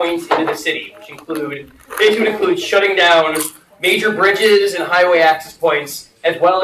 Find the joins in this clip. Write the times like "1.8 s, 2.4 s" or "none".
none